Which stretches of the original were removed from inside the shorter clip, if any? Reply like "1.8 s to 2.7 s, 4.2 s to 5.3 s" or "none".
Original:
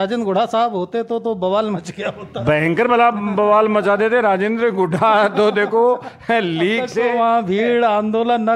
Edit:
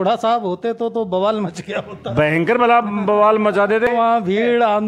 4.2 s to 7.1 s